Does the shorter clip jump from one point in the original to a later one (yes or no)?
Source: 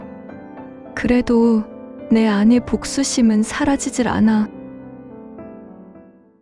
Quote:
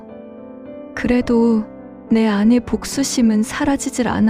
no